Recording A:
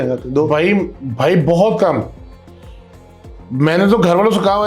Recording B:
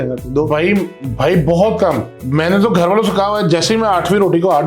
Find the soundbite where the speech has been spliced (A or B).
B